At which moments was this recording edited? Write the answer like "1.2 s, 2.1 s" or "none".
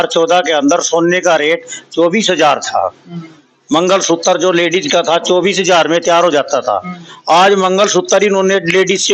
none